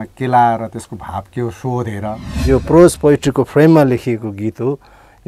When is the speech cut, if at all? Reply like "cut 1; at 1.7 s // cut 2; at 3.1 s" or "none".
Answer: cut 1; at 2.3 s